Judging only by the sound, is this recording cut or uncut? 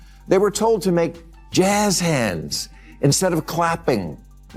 uncut